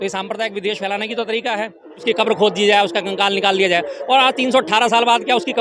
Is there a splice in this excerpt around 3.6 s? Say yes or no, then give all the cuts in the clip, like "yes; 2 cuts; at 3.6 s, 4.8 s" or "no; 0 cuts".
no; 1 cut; at 2.0 s